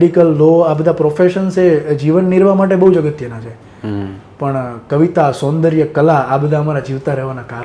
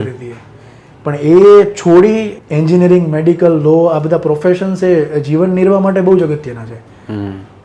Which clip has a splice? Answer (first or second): second